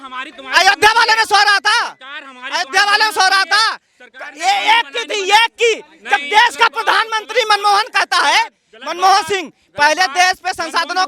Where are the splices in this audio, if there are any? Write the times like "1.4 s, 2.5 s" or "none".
none